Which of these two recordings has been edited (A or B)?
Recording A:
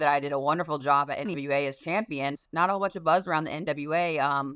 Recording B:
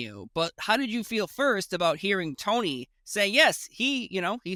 A